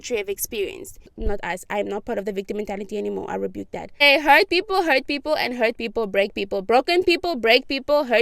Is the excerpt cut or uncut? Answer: cut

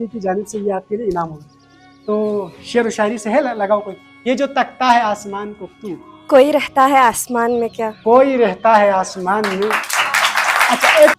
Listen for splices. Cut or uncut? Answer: uncut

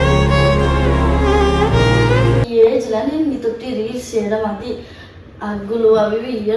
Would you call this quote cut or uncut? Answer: cut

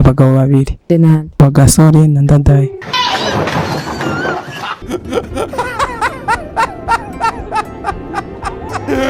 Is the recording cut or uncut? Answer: uncut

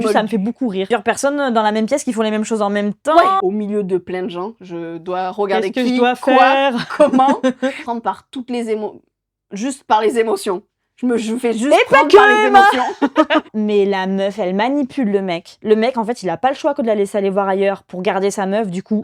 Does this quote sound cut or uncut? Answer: cut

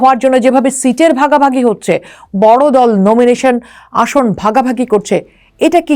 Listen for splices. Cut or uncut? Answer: uncut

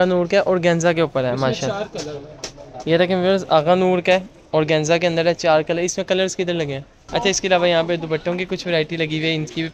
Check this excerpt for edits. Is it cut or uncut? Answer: cut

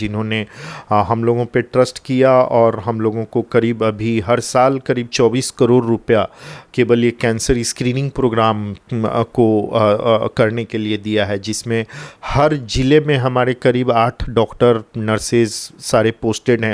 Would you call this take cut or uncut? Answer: uncut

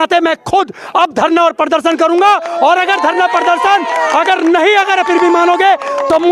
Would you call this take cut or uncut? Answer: uncut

